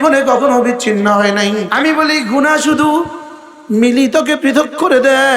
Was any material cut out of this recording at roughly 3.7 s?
no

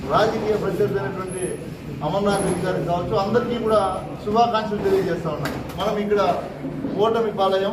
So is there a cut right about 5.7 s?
yes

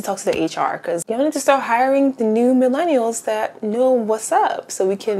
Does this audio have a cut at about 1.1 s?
yes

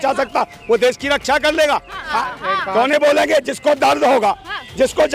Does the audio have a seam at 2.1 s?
yes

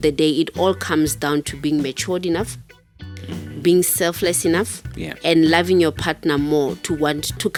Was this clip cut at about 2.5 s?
no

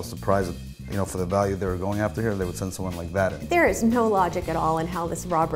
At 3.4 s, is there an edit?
yes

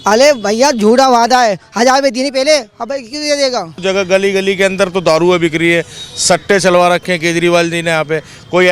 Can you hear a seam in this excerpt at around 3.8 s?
yes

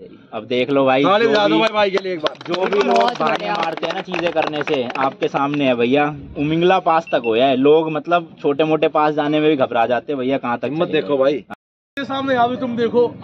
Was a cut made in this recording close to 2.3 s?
no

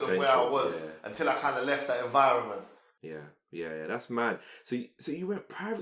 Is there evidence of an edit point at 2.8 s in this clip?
no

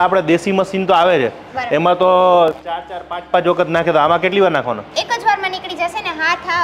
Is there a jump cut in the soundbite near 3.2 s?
no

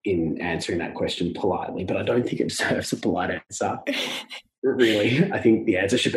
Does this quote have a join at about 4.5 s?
no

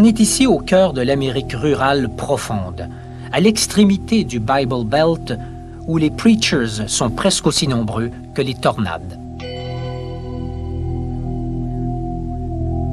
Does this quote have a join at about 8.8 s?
yes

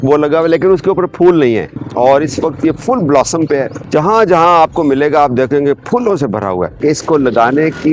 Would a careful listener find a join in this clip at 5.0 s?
no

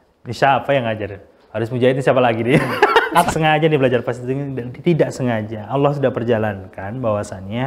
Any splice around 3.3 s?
yes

